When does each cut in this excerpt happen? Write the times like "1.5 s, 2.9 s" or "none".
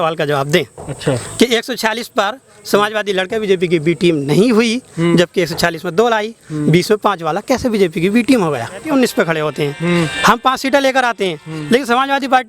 8.8 s